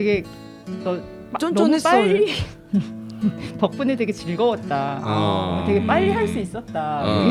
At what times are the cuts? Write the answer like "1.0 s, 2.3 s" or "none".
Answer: none